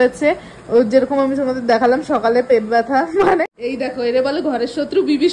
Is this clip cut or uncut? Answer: cut